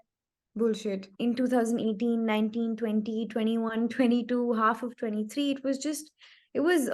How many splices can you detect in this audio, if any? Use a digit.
1